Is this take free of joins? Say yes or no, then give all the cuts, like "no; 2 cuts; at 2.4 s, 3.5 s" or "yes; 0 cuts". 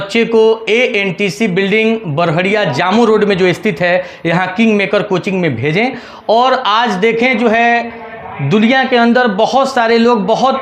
yes; 0 cuts